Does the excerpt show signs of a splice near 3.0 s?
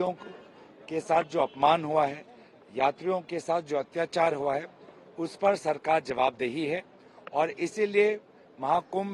no; 0 cuts

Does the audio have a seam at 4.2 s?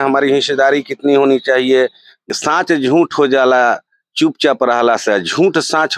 no; 1 cut; at 2.3 s

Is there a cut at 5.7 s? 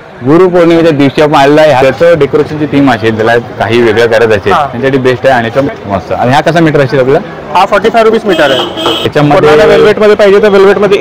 yes; 3 cuts; at 1.8 s, 5.7 s, 9.0 s

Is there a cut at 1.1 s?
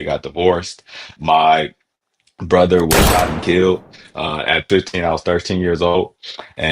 yes; 2 cuts; at 1.1 s, 4.7 s

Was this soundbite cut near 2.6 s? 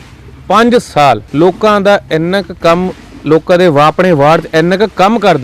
no; 1 cut; at 1.3 s

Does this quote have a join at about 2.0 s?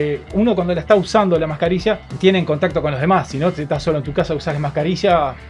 no; 0 cuts

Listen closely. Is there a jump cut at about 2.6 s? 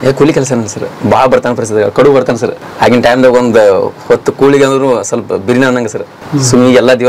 yes; 2 cuts; at 2.6 s, 6.1 s

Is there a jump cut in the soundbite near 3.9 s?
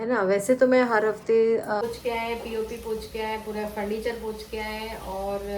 no; 1 cut; at 1.8 s

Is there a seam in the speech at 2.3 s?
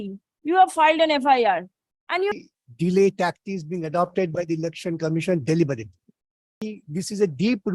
yes; 2 cuts; at 2.3 s, 6.7 s

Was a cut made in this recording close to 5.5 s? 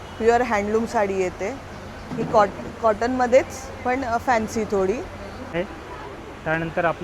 yes; 1 cut; at 5.5 s

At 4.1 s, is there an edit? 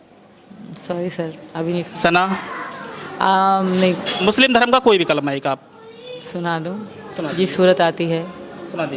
yes; 1 cut; at 4.1 s

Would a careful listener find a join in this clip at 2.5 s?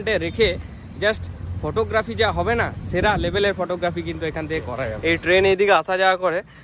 no; 1 cut; at 5.0 s

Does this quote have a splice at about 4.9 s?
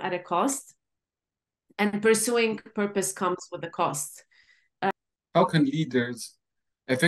yes; 1 cut; at 4.9 s

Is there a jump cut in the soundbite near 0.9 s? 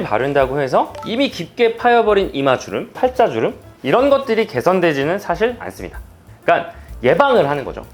no; 0 cuts

